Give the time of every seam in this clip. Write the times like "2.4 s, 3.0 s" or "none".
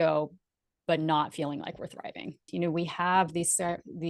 2.5 s

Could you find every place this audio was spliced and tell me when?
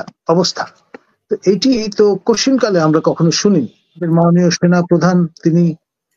4.0 s

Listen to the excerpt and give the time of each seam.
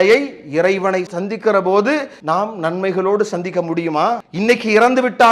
2.1 s, 4.3 s

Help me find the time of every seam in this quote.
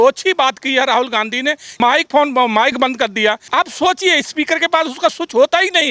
1.7 s, 3.4 s

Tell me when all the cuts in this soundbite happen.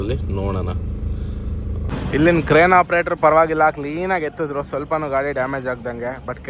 1.9 s

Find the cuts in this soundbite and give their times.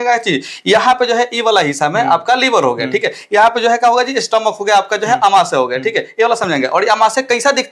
none

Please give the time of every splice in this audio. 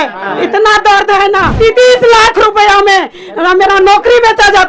1.5 s

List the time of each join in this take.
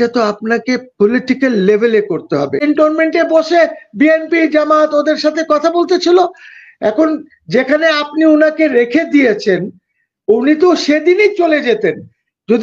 2.6 s

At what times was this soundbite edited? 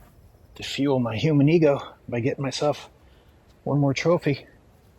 none

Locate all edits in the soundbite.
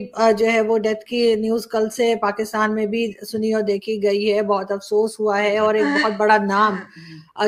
none

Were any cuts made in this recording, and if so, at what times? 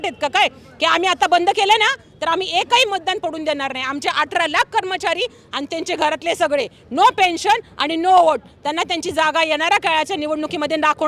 none

